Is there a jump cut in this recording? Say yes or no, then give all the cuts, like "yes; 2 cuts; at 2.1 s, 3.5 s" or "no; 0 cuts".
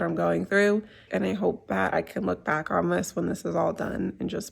yes; 1 cut; at 1.1 s